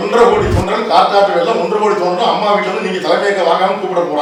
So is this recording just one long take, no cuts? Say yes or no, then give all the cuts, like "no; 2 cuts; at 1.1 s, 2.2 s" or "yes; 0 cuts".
yes; 0 cuts